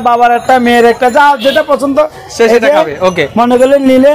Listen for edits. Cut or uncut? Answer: uncut